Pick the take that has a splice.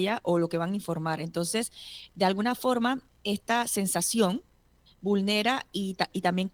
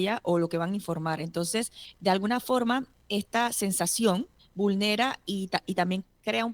second; 2 cuts; at 1.8 s, 4.4 s

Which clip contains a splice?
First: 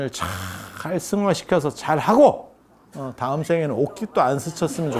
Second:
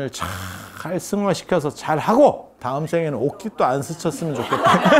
second; 1 cut; at 2.5 s

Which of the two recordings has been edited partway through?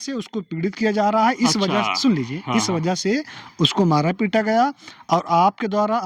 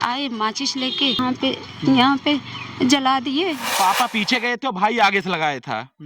second; 2 cuts; at 1.2 s, 3.6 s

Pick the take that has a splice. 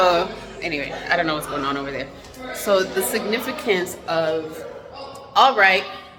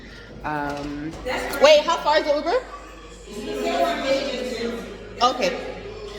second; 1 cut; at 1.2 s

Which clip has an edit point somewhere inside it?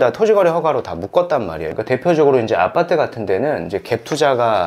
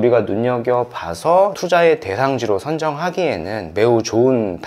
first; 1 cut; at 1.6 s

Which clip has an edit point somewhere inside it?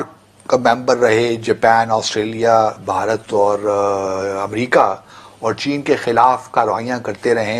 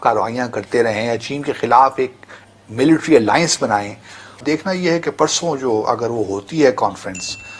second; 1 cut; at 4.4 s

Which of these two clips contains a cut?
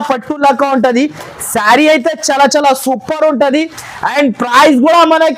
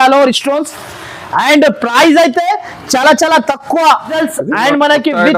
second; 1 cut; at 4.2 s

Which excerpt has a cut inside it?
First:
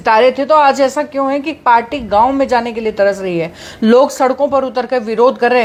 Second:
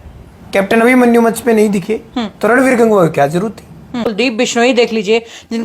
second; 1 cut; at 4.2 s

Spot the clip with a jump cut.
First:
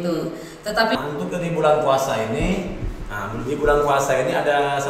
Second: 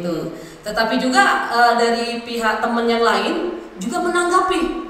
first; 1 cut; at 1.0 s

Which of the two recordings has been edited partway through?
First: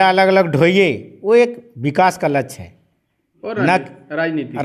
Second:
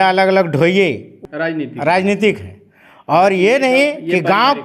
second; 1 cut; at 1.1 s

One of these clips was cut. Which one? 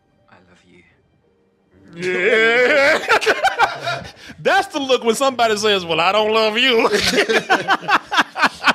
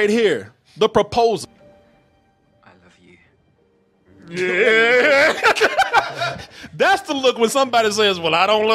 second; 1 cut; at 1.4 s

